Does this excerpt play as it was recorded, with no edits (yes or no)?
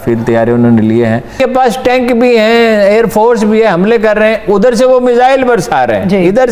no